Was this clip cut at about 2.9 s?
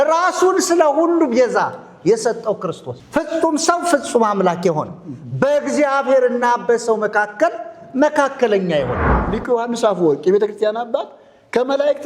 yes; 2 cuts; at 2.9 s, 9.4 s

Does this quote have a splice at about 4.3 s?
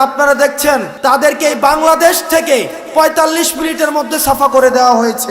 no; 1 cut; at 0.9 s

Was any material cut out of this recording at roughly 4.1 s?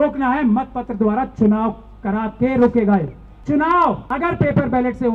yes; 2 cuts; at 3.3 s, 4.1 s

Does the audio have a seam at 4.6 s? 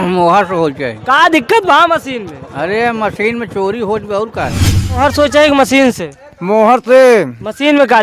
yes; 1 cut; at 4.6 s

